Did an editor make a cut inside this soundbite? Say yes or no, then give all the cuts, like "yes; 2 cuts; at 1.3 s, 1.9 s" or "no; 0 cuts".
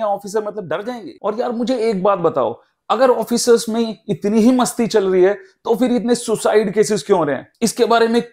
yes; 1 cut; at 1.1 s